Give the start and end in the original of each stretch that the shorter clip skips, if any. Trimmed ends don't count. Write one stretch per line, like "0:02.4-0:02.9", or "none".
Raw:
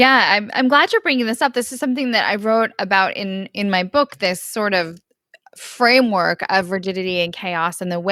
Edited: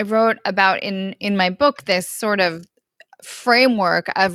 none